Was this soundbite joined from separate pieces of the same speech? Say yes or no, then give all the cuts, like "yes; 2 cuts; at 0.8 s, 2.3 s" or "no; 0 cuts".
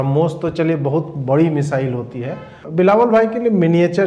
yes; 1 cut; at 2.6 s